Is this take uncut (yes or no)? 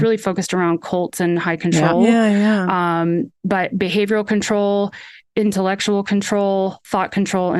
yes